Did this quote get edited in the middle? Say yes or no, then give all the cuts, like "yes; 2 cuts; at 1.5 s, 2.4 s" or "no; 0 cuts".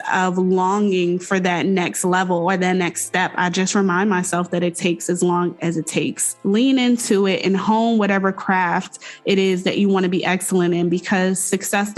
yes; 1 cut; at 6.3 s